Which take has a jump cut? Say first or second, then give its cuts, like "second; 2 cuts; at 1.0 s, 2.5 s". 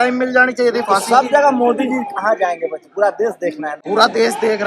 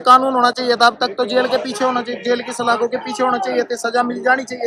first; 1 cut; at 3.7 s